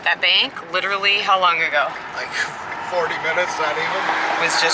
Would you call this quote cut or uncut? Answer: uncut